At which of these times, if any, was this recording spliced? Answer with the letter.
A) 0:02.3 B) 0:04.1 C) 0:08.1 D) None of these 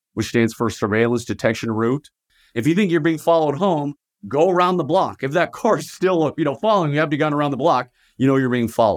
A